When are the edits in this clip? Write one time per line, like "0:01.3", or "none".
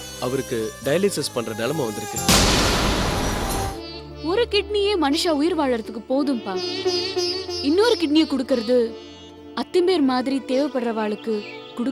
0:03.7